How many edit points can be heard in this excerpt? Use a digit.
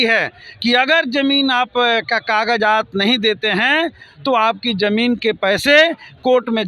0